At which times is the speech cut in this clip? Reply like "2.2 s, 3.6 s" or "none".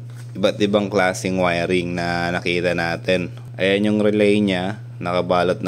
3.4 s